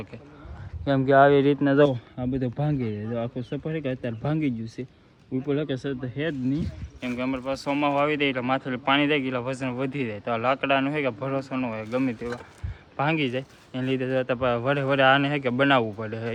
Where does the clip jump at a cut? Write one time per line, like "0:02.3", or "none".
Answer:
none